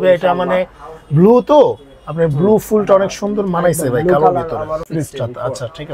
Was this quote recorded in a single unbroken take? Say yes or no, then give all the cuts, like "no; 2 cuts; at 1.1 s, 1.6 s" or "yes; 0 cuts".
no; 1 cut; at 4.9 s